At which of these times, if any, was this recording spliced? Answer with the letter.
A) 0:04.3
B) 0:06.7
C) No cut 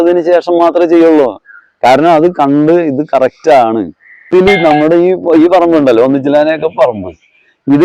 A